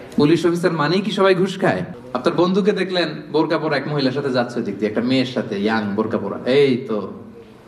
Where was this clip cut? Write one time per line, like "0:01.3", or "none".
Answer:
0:01.9